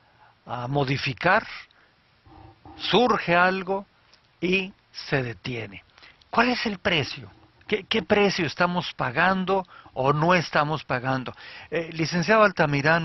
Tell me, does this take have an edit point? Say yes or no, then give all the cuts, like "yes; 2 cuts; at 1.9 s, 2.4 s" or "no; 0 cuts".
no; 0 cuts